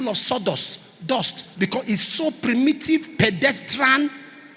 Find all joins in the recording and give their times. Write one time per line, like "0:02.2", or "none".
0:01.4

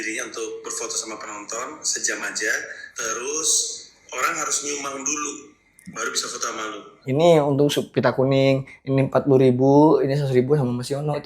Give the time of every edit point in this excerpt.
0:02.8
0:07.0

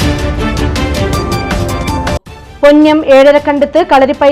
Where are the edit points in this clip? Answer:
0:02.4

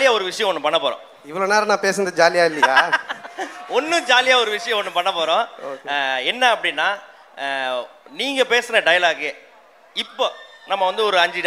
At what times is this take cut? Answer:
none

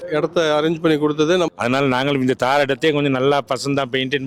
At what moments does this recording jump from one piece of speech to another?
0:01.5

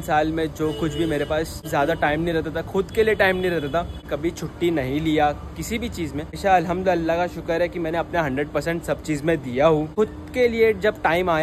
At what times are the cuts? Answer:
0:01.6
0:04.1
0:06.4
0:09.9

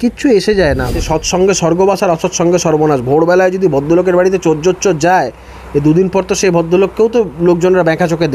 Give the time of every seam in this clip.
0:01.0

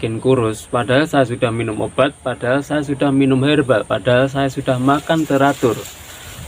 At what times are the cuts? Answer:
none

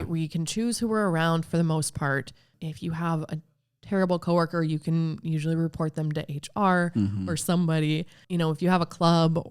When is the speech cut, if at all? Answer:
0:02.5
0:08.2

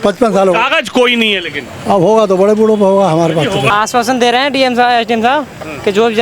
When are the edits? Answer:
0:03.7

